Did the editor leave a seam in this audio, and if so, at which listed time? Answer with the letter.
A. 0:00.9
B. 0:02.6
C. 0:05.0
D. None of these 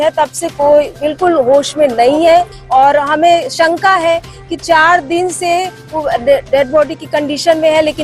B